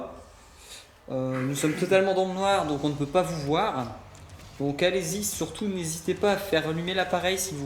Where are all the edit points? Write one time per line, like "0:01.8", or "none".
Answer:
none